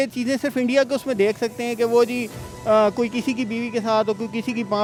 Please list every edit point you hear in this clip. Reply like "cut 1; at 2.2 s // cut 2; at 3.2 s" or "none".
none